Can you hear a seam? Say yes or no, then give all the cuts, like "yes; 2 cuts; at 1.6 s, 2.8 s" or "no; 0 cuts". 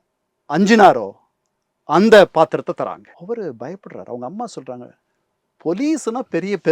yes; 1 cut; at 3.1 s